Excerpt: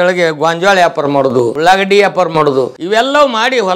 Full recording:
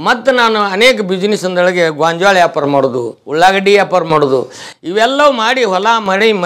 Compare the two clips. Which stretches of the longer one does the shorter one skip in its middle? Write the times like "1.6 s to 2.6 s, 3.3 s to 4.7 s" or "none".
3.1 s to 3.3 s, 4.5 s to 4.8 s